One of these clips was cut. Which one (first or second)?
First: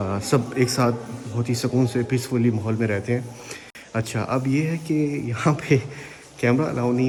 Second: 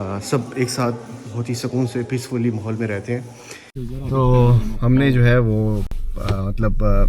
second